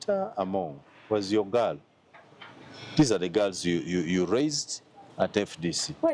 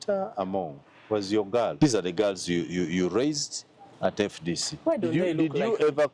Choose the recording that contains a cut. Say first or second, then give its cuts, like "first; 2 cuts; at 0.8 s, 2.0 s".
second; 1 cut; at 1.7 s